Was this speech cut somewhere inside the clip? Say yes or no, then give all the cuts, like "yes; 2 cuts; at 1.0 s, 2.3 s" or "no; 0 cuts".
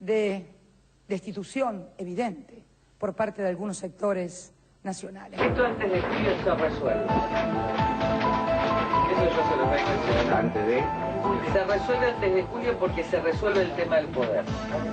yes; 1 cut; at 5.2 s